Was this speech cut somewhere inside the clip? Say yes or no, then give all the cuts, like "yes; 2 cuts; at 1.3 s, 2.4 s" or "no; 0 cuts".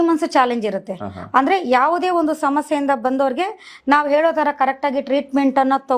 no; 0 cuts